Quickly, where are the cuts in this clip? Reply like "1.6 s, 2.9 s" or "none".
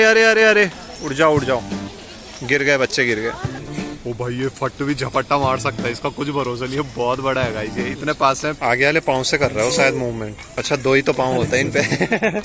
3.6 s, 8.6 s, 10.5 s